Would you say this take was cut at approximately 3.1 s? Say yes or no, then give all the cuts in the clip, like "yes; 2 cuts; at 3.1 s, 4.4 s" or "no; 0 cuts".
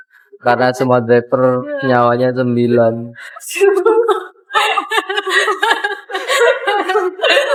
no; 0 cuts